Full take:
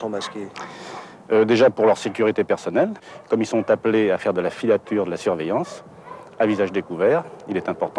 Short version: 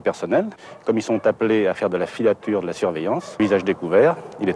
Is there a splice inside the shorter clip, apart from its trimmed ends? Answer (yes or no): yes